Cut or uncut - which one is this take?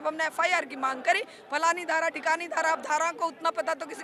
uncut